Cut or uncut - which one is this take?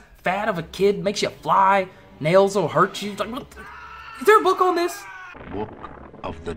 cut